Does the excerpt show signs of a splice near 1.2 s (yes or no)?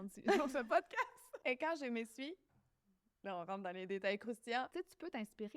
yes